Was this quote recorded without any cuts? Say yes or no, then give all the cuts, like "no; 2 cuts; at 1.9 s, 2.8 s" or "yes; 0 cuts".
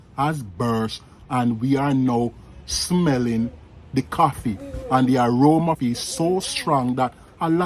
no; 1 cut; at 5.8 s